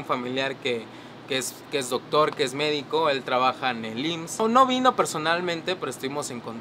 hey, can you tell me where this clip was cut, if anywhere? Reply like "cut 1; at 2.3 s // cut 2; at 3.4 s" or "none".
cut 1; at 4.4 s

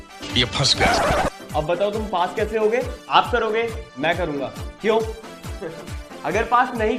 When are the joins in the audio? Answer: none

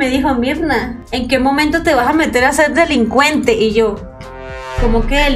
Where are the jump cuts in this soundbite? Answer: none

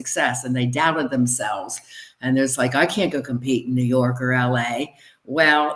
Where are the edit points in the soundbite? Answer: none

